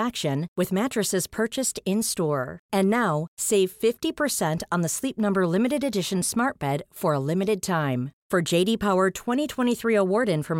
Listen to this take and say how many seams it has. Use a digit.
0